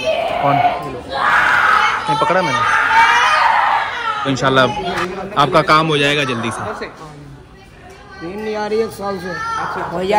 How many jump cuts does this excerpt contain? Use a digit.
1